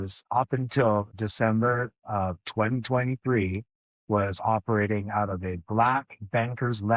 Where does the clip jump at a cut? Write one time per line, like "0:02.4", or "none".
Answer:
0:01.1